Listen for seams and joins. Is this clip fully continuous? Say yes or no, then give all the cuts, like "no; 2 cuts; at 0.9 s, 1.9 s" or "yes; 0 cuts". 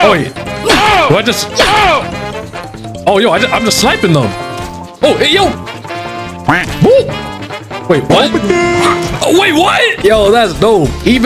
no; 1 cut; at 9.9 s